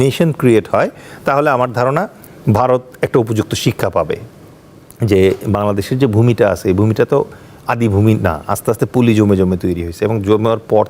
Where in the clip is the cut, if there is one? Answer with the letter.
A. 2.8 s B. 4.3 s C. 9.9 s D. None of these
B